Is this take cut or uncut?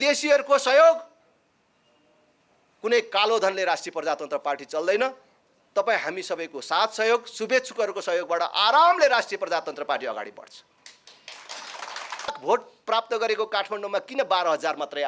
cut